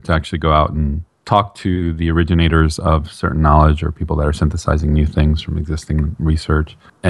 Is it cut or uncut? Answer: uncut